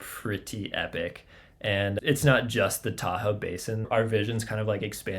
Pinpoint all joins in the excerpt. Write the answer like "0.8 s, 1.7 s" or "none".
2.0 s, 3.9 s

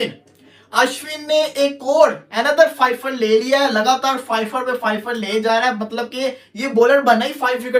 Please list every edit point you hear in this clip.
none

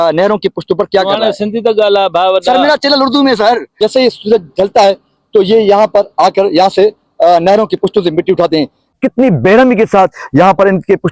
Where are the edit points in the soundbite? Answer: 3.7 s, 9.0 s

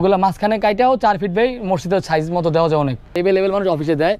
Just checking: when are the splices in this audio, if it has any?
3.2 s

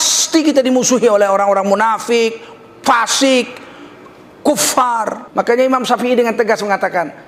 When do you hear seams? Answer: 5.2 s

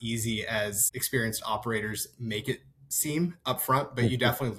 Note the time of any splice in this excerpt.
none

